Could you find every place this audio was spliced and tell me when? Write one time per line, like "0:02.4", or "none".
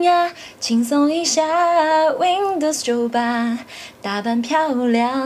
none